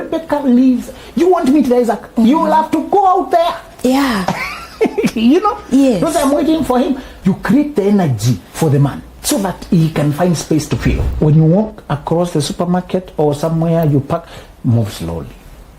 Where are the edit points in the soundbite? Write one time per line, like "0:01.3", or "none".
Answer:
0:07.1
0:09.1
0:11.0